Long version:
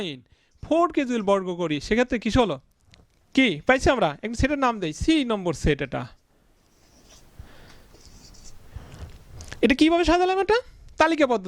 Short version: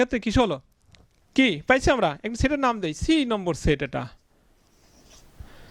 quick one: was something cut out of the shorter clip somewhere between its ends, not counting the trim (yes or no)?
no